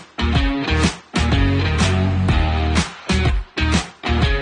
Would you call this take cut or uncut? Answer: uncut